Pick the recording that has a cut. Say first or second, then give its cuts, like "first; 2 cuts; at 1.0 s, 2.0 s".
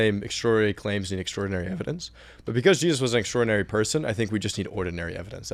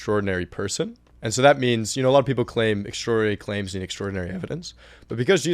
second; 1 cut; at 1.0 s